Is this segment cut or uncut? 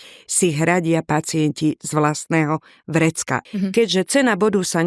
cut